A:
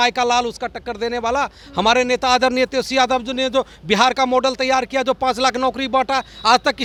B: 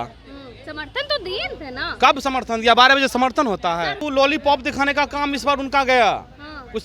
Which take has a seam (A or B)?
B